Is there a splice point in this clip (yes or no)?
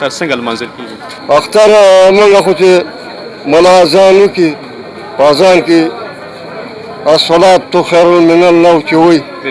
yes